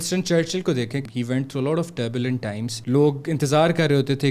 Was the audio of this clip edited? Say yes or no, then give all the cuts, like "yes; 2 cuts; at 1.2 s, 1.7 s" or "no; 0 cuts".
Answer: yes; 2 cuts; at 1.1 s, 2.7 s